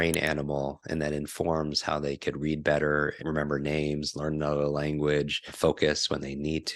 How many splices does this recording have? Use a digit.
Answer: 2